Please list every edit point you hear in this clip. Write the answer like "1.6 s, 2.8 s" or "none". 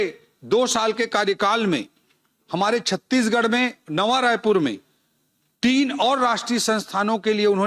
none